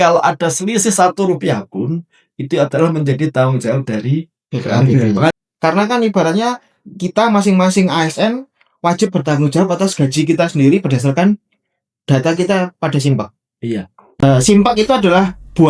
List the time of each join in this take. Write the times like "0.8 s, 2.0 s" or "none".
5.3 s, 14.1 s